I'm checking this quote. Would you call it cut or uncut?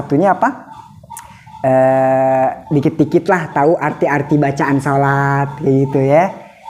uncut